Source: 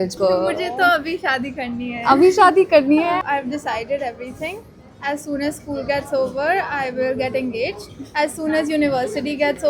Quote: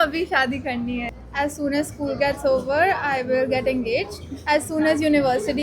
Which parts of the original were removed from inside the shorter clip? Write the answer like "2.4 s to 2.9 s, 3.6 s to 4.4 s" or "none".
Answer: 2.0 s to 4.7 s